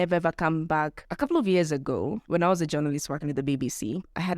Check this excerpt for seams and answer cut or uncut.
cut